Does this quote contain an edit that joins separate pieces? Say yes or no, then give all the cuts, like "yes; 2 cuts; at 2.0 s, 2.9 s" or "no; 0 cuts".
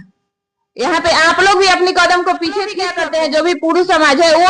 yes; 1 cut; at 2.9 s